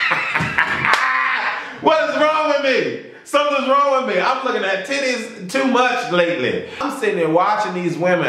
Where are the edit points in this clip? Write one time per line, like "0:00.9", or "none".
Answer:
0:06.8